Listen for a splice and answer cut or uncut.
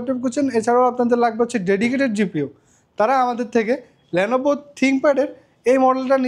uncut